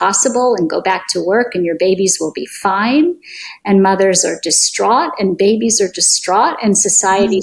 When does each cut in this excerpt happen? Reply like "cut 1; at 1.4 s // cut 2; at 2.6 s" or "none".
none